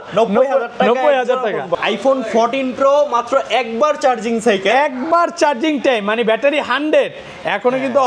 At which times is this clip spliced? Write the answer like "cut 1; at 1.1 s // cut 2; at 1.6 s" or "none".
cut 1; at 1.8 s